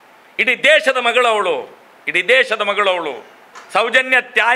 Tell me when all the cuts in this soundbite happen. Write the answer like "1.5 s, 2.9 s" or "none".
3.5 s